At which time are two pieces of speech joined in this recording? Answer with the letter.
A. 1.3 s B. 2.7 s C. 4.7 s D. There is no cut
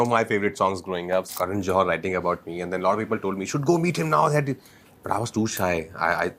A